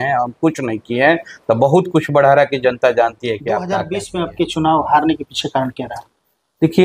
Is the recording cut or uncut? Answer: cut